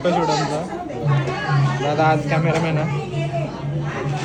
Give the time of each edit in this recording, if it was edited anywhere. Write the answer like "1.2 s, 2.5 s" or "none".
none